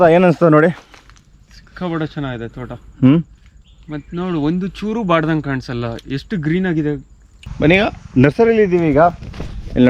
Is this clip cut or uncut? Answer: cut